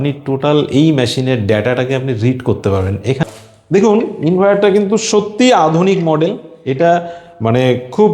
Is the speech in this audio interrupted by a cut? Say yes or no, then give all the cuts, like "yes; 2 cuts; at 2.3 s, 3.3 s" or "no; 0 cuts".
yes; 1 cut; at 3.2 s